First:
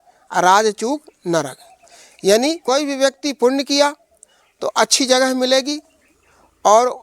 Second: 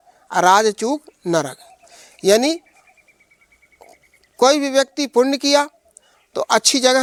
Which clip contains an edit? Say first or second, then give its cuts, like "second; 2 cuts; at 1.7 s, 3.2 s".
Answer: first; 1 cut; at 2.6 s